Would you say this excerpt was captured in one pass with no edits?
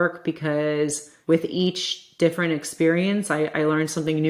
no; 1 cut; at 1.1 s

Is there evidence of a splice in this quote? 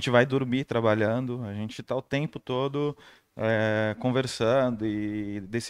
no; 0 cuts

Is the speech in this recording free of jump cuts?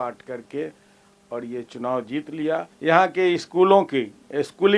no; 1 cut; at 2.7 s

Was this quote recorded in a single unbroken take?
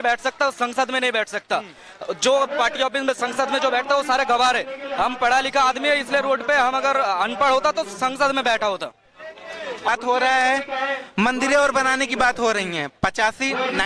no; 1 cut; at 9.9 s

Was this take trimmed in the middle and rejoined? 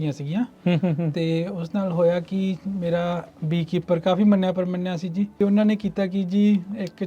yes; 1 cut; at 5.3 s

